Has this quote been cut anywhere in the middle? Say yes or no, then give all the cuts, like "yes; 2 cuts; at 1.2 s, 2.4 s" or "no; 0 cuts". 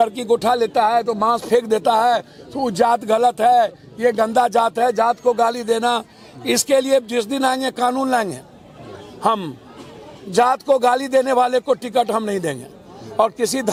no; 0 cuts